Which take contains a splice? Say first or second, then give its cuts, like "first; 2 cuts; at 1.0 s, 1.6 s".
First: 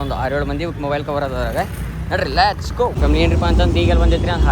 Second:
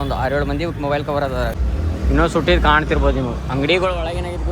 second; 1 cut; at 1.5 s